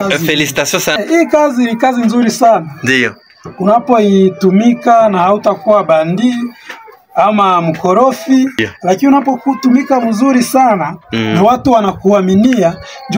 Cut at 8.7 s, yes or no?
yes